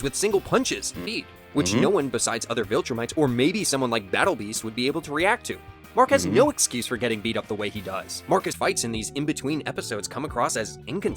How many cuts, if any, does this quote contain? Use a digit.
2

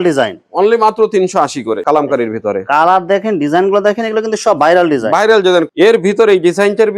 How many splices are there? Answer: 2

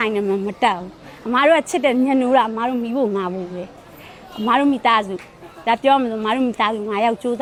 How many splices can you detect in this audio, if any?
0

